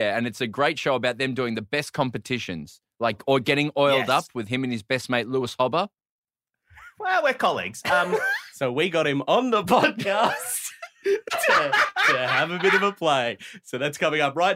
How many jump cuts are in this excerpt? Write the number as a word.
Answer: one